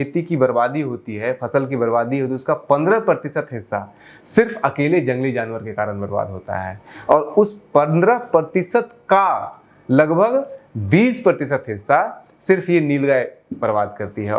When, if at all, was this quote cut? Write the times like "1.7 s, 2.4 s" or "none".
none

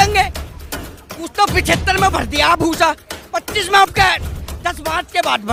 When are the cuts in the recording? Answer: none

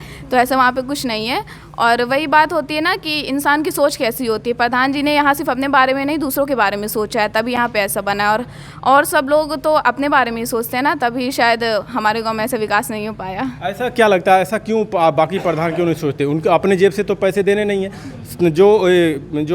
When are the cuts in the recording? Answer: none

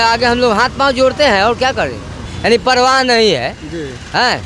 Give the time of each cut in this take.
2.2 s

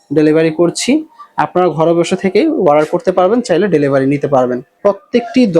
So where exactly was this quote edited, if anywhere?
4.7 s

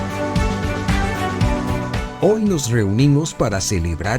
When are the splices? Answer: 2.1 s

